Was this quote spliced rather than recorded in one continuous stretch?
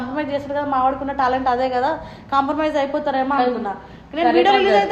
no; 0 cuts

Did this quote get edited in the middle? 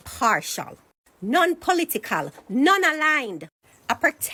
no; 0 cuts

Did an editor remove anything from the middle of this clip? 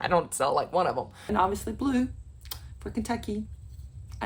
yes; 1 cut; at 1.2 s

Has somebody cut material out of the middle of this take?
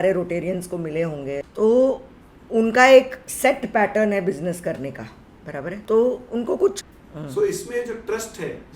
yes; 3 cuts; at 1.5 s, 5.8 s, 6.9 s

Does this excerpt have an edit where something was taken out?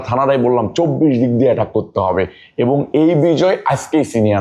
no; 0 cuts

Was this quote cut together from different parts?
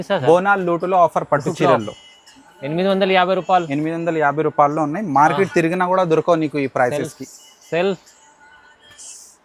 no; 0 cuts

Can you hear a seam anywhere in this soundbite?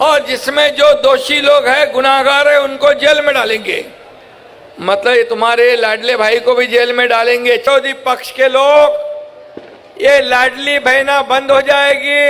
yes; 1 cut; at 7.7 s

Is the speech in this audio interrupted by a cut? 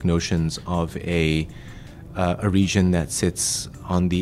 no; 0 cuts

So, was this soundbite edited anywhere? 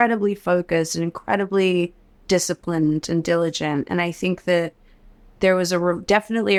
no; 0 cuts

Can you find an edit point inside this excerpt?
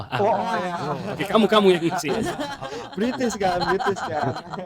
no; 0 cuts

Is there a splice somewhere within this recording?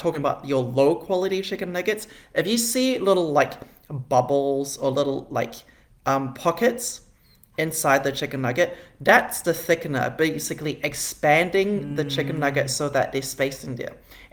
no; 0 cuts

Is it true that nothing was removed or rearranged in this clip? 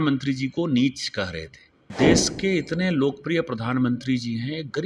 no; 1 cut; at 1.9 s

